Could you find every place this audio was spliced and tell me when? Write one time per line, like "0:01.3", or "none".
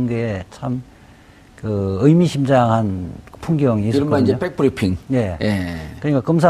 none